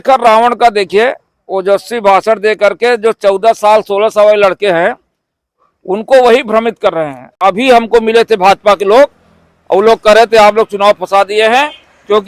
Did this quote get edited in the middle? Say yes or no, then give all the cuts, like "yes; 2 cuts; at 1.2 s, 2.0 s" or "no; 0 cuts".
yes; 1 cut; at 7.2 s